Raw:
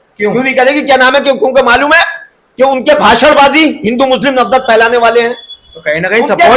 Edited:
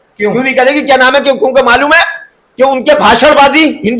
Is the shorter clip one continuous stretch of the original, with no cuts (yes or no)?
yes